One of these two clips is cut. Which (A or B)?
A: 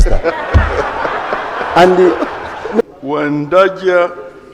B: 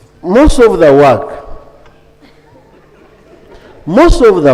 A